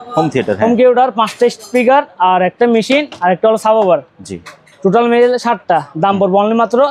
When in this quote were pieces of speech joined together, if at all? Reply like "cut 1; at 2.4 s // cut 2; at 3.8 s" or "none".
none